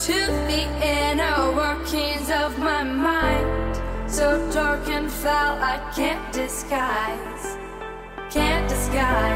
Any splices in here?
no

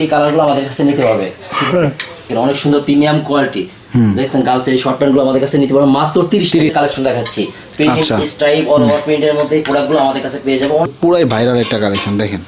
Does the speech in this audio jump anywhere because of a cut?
yes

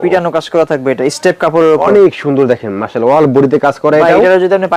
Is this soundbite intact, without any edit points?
yes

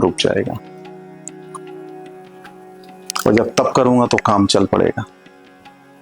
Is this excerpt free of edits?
yes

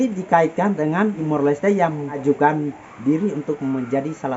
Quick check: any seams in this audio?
yes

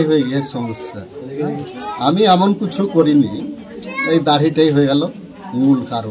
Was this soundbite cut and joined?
no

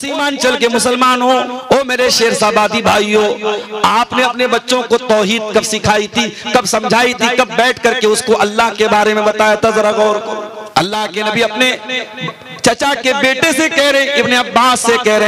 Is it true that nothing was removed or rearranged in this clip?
no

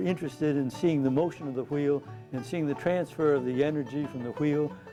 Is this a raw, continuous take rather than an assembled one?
yes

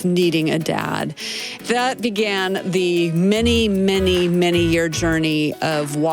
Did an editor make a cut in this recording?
yes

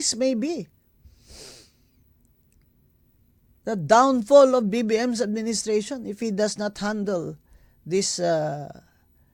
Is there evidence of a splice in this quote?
no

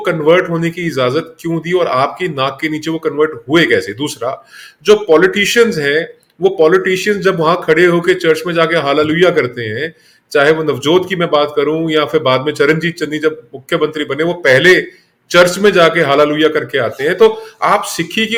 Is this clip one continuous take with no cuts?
yes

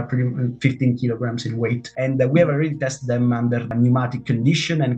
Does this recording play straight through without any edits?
no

